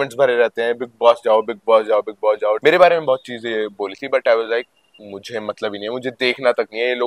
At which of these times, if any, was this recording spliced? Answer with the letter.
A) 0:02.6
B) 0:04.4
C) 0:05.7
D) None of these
A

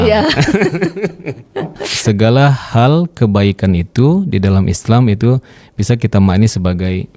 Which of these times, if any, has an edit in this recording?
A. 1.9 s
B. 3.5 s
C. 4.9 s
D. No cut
A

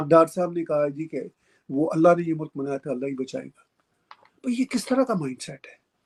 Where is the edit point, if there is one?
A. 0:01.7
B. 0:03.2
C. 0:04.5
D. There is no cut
D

